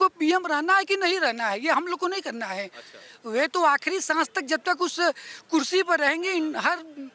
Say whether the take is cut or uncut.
uncut